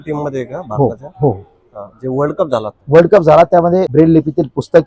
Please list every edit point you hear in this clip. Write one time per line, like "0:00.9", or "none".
0:03.9